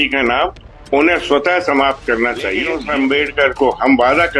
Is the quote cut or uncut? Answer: cut